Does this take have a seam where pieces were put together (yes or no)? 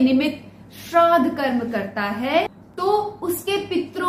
no